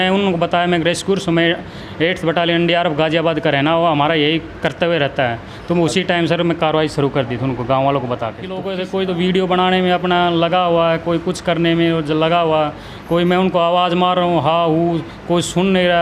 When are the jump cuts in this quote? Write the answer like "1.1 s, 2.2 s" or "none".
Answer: 8.6 s